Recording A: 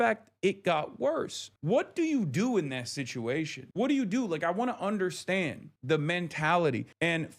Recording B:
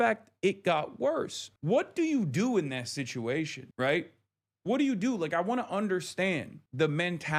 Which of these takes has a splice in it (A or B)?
A